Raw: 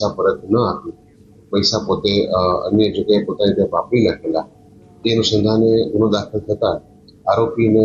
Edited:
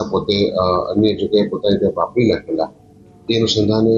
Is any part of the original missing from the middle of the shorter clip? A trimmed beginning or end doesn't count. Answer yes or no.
no